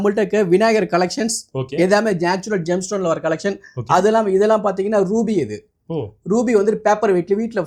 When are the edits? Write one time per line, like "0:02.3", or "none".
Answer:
none